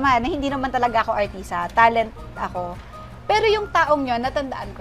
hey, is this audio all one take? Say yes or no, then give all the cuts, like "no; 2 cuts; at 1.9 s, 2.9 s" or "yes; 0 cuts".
yes; 0 cuts